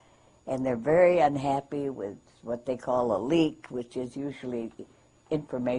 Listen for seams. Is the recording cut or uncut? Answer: uncut